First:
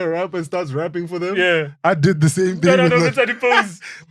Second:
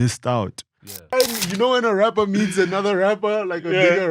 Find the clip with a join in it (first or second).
second